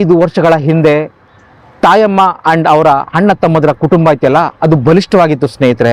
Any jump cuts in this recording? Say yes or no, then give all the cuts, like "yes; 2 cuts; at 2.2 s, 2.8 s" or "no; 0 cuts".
no; 0 cuts